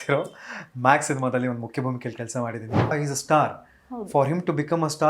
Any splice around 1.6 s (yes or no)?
no